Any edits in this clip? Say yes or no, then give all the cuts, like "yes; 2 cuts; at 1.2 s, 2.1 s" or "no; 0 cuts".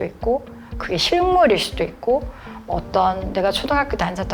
no; 0 cuts